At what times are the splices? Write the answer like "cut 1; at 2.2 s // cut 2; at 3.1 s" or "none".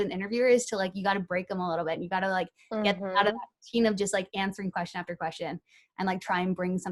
none

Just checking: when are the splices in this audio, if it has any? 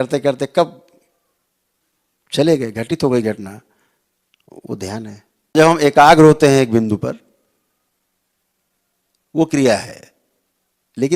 cut 1; at 5.6 s

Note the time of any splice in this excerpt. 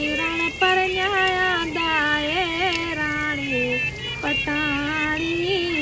none

